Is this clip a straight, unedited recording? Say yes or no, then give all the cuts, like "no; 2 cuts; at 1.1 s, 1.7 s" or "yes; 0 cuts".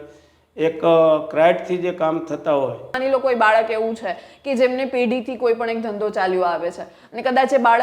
no; 1 cut; at 2.9 s